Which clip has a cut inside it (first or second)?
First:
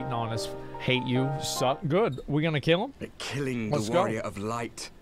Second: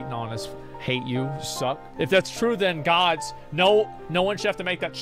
first